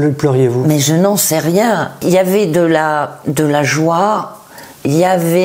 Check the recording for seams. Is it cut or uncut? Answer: cut